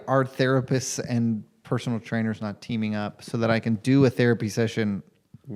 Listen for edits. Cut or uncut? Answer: uncut